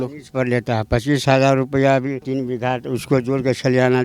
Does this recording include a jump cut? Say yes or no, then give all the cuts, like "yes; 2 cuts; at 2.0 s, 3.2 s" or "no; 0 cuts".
yes; 1 cut; at 2.2 s